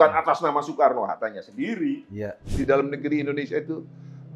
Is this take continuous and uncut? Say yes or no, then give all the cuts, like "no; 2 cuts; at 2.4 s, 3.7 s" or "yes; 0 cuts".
no; 1 cut; at 2.4 s